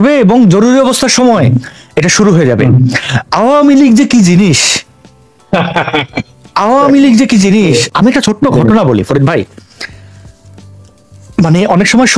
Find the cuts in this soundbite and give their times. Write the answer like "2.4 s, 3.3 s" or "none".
none